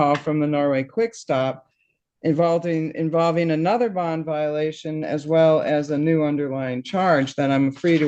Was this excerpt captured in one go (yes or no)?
yes